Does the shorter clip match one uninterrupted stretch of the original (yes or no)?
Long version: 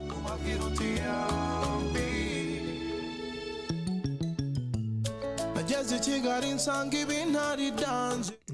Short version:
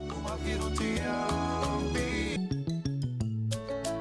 no